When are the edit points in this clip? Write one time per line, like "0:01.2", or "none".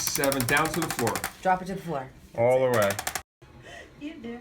0:03.3